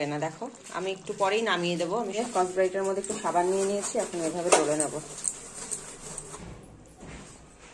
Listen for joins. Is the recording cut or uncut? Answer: cut